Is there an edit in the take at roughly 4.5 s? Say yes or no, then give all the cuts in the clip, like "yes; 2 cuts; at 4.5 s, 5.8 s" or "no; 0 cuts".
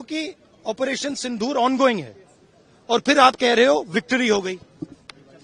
no; 0 cuts